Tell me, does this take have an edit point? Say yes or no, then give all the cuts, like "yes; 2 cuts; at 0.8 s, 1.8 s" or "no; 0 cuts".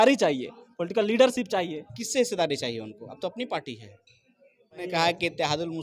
yes; 1 cut; at 4.8 s